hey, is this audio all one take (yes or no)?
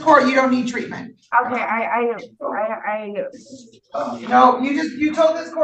yes